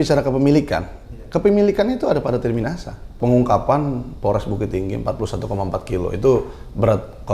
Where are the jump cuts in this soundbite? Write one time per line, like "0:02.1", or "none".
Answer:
0:03.1